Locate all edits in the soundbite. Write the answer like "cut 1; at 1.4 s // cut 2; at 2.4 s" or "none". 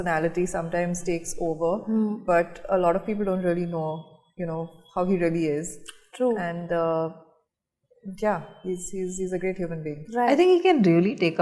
none

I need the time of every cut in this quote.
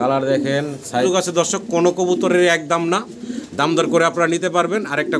cut 1; at 1.0 s

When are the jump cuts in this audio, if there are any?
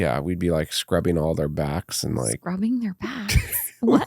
cut 1; at 2.4 s

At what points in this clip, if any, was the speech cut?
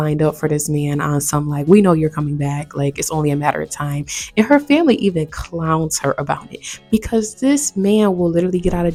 none

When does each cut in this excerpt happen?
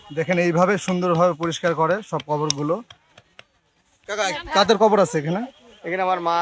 cut 1; at 3.9 s

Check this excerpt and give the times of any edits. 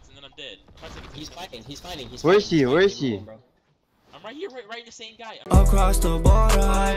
cut 1; at 5.5 s

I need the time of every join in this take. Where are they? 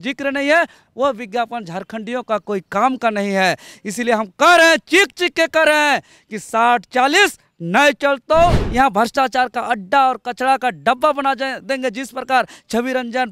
cut 1; at 8.6 s

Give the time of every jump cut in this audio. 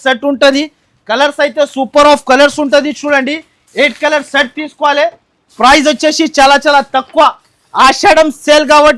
none

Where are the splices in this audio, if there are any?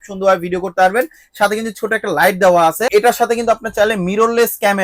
cut 1; at 2.9 s

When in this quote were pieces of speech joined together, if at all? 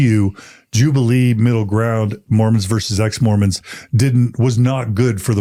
none

